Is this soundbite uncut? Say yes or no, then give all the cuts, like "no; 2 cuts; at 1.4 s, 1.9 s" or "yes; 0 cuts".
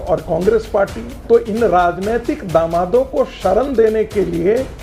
no; 1 cut; at 1.1 s